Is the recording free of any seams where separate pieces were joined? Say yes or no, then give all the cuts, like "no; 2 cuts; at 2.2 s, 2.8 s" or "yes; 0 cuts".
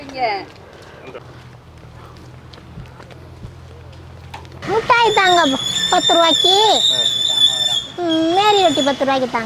no; 2 cuts; at 1.2 s, 4.6 s